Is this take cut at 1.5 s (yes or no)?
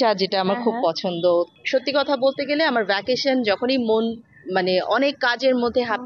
yes